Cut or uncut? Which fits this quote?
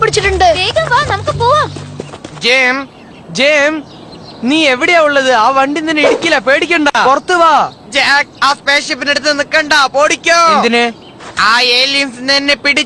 cut